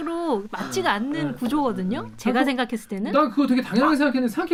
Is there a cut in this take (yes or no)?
no